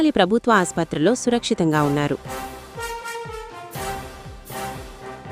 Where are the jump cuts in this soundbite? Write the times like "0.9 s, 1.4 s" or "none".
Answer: 2.2 s